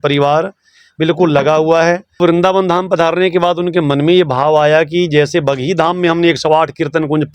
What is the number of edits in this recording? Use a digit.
1